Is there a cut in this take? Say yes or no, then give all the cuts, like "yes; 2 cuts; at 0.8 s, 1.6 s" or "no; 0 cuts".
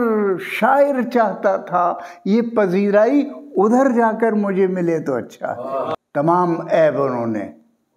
yes; 1 cut; at 6.0 s